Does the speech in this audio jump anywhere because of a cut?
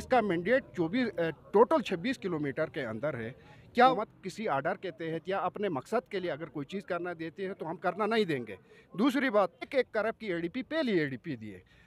yes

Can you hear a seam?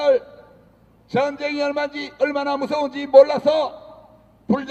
no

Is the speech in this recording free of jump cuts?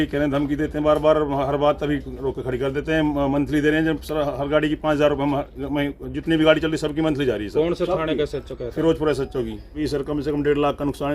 no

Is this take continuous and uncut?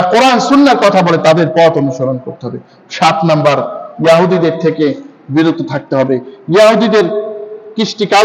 yes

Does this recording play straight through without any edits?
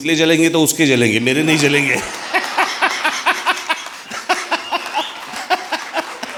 yes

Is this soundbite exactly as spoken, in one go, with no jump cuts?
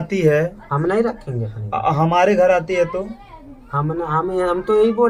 yes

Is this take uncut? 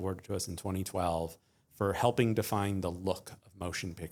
yes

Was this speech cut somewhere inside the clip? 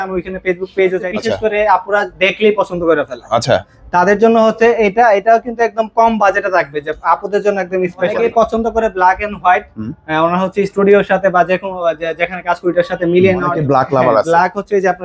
yes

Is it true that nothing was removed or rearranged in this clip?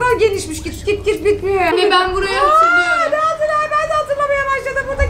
no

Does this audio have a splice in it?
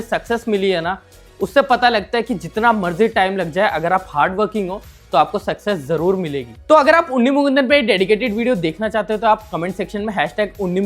no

